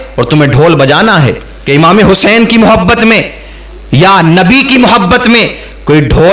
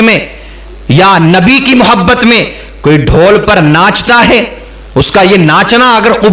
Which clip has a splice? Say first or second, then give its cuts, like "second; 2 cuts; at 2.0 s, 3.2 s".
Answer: first; 1 cut; at 1.5 s